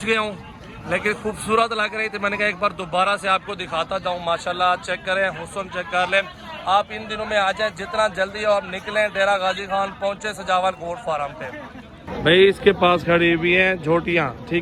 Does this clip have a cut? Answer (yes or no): no